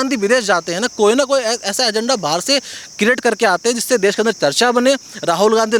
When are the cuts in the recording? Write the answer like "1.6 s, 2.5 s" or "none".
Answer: none